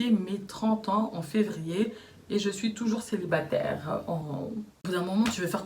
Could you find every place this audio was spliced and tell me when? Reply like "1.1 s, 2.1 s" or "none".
4.7 s